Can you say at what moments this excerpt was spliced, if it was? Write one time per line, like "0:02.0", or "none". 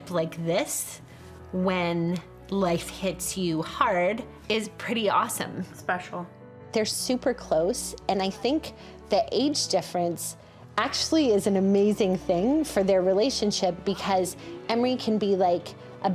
0:04.3
0:06.5